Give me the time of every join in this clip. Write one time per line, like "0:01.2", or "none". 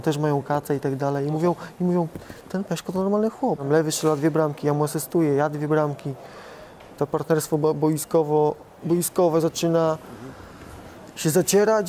0:03.6